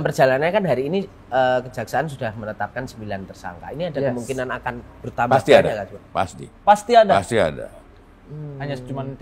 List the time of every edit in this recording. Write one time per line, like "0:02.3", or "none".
none